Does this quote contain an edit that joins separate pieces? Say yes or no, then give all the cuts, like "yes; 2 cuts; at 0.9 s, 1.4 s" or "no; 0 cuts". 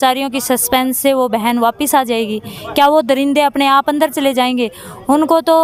no; 0 cuts